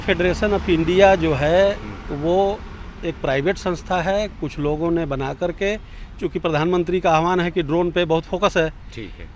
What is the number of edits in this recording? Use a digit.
0